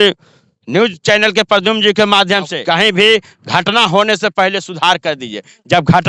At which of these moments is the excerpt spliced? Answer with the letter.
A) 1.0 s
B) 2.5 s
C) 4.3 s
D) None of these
B